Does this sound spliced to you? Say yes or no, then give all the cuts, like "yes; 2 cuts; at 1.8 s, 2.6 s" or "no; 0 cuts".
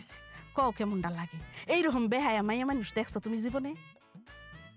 no; 0 cuts